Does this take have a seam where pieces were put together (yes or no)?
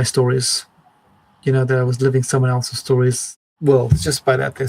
yes